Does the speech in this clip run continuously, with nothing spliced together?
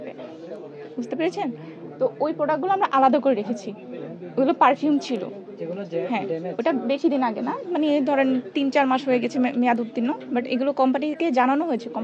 yes; 0 cuts

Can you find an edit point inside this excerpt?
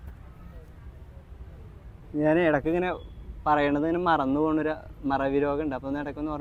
no; 0 cuts

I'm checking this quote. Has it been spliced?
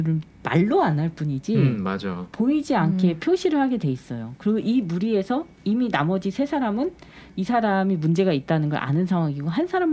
no; 0 cuts

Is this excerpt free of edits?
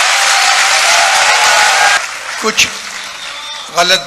no; 1 cut; at 2.0 s

